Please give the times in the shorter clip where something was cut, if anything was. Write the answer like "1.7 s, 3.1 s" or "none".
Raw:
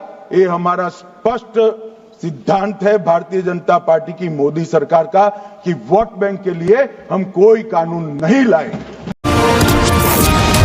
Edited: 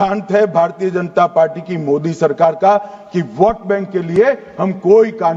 none

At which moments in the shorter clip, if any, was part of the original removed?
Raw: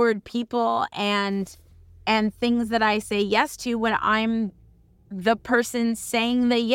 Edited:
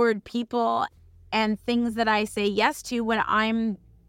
0.9 s

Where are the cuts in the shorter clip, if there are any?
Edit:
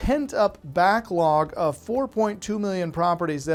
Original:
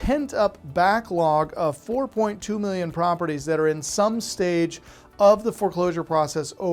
none

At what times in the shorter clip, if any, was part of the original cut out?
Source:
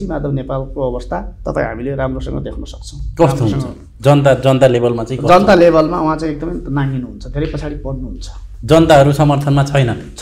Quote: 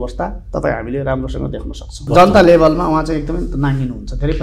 2.0 s

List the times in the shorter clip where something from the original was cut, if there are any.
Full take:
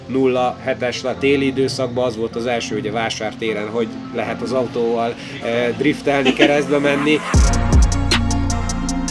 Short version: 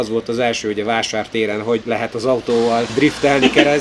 1.8 s, 2.9 s

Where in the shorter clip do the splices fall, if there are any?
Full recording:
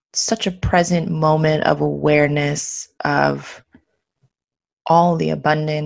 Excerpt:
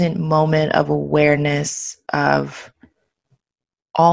none

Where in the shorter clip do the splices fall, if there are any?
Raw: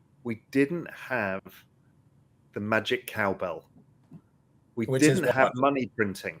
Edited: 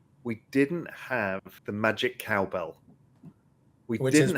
1.5 s

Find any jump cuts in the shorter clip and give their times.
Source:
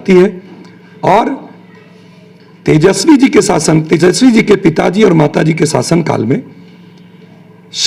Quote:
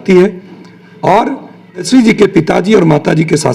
1.9 s

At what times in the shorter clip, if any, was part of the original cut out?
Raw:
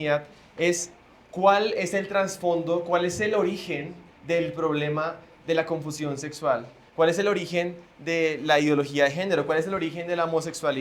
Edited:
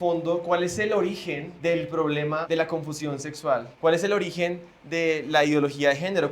1.5 s, 2.4 s, 3.7 s

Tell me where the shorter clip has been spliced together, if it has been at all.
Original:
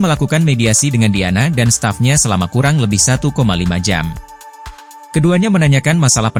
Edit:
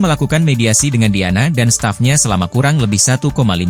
none

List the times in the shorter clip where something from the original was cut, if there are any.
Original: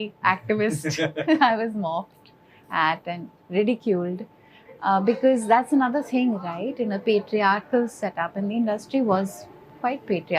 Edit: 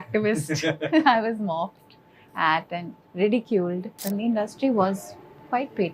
4.0 s

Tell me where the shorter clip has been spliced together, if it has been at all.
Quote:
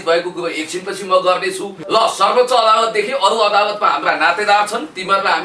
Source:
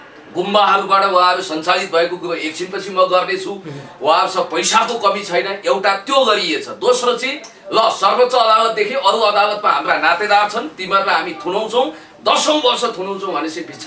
1.7 s

